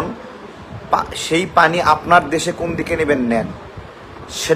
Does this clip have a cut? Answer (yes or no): no